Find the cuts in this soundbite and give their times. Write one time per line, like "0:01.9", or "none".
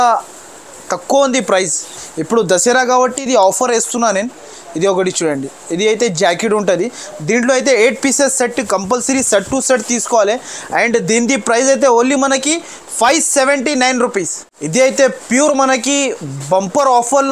none